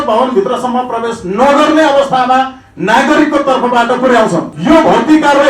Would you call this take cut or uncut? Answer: cut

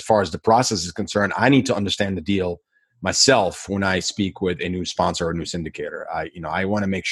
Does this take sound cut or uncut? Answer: uncut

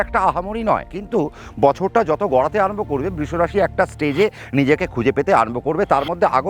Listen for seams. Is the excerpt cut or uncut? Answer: cut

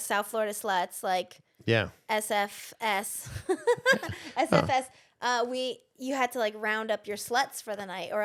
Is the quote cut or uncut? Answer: uncut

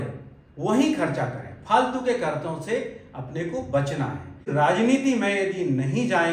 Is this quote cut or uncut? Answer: cut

